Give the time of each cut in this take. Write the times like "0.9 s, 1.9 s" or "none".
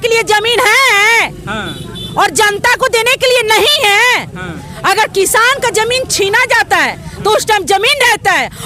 none